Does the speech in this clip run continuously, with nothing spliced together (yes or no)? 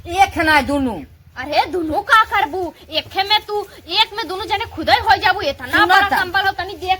yes